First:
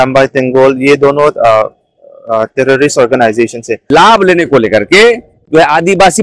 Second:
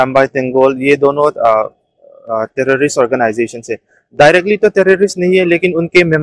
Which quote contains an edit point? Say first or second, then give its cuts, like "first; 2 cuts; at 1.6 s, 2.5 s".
first; 1 cut; at 3.8 s